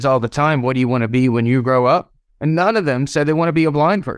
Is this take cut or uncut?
uncut